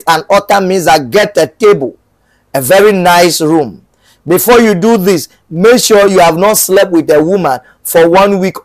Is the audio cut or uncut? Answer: uncut